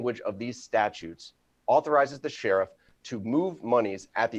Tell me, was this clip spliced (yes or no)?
no